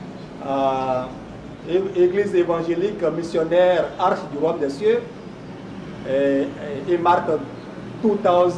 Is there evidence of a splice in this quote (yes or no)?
no